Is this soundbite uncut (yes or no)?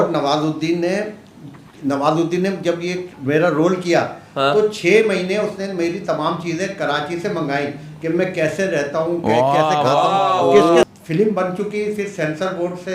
no